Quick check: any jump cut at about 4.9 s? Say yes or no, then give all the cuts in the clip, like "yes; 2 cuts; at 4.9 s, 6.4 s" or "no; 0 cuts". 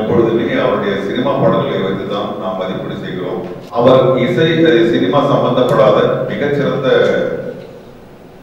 no; 1 cut; at 3.6 s